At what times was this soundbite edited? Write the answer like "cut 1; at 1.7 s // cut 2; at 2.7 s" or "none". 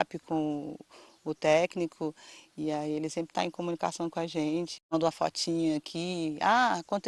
cut 1; at 4.8 s